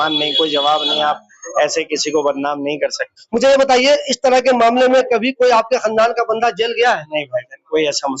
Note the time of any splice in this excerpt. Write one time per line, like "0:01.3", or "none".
0:03.1